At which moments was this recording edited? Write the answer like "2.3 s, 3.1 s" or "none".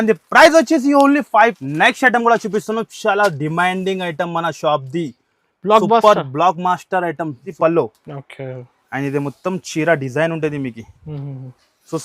1.6 s, 7.5 s